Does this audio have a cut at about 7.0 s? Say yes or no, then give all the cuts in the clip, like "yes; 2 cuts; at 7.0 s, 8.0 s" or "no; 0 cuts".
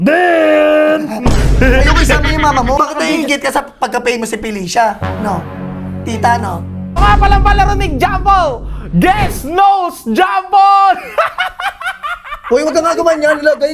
yes; 2 cuts; at 2.8 s, 7.0 s